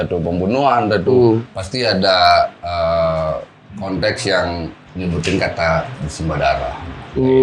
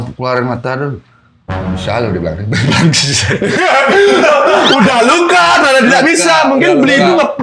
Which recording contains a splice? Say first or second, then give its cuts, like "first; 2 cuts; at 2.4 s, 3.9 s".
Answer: first; 2 cuts; at 1.6 s, 4.8 s